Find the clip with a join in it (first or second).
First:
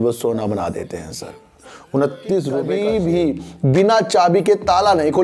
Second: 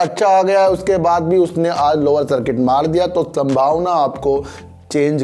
first